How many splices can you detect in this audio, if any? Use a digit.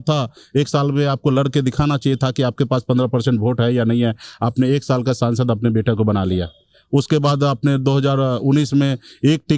0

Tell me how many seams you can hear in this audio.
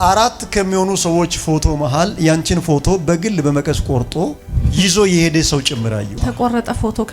1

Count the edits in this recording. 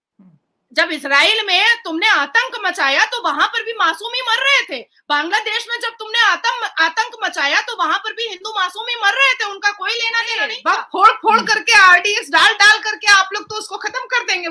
1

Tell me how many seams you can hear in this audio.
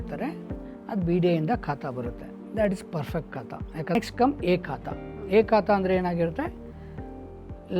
1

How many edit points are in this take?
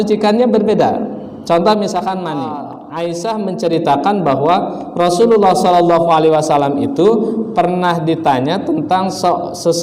1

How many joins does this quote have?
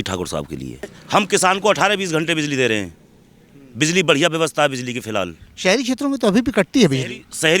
1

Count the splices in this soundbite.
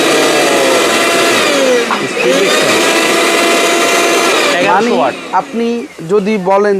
0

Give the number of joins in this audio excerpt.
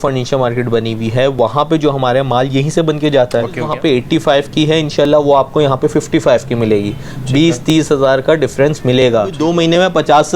2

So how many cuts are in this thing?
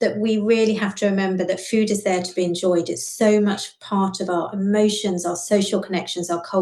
0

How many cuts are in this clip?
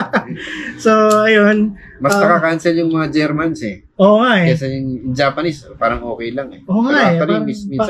0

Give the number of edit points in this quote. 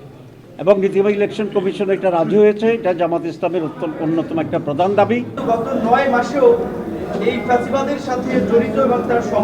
1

